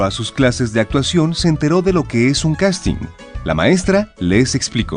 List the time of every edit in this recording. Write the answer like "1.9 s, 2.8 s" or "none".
none